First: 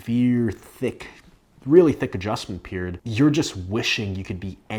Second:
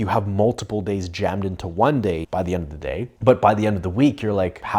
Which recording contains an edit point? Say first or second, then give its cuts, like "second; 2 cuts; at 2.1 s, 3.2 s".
second; 1 cut; at 2.2 s